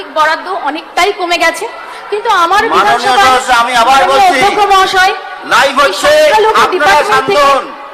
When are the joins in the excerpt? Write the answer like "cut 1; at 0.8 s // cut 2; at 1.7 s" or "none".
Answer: none